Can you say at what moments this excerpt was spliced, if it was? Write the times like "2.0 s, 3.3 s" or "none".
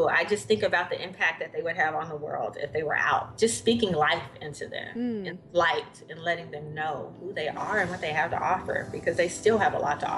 3.3 s